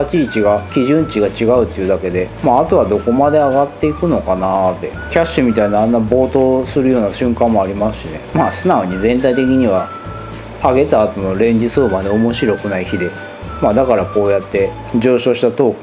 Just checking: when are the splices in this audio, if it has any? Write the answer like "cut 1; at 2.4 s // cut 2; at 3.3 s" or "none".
none